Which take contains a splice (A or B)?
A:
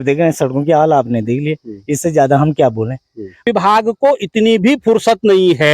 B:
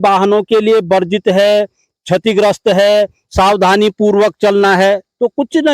A